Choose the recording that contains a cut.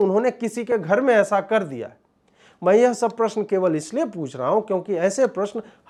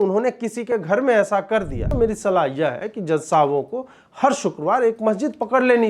second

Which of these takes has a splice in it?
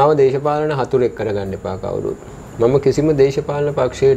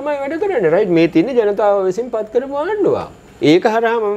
second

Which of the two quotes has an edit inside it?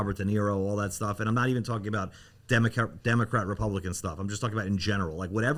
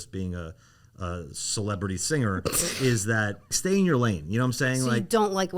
second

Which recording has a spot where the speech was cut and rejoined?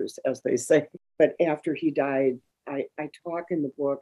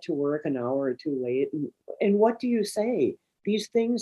first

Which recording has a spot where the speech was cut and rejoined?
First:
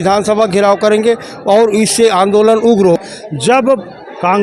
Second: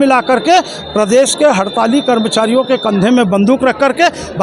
first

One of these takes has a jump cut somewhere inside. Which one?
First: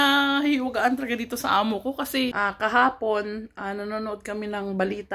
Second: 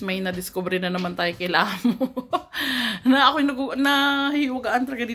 first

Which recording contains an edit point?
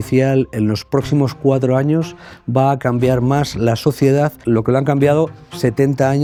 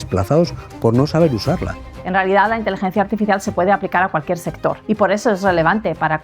second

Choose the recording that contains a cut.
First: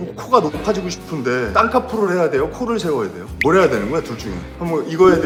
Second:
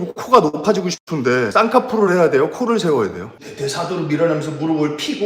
second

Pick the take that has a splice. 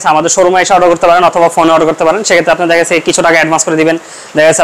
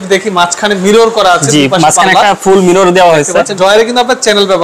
second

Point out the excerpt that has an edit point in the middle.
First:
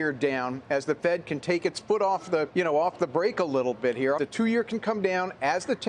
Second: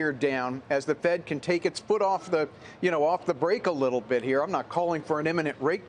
first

